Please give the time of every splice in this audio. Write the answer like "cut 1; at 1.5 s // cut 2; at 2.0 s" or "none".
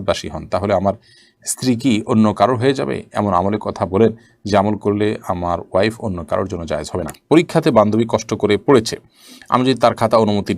cut 1; at 7.1 s